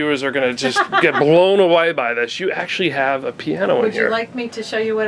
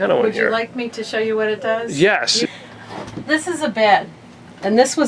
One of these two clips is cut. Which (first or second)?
second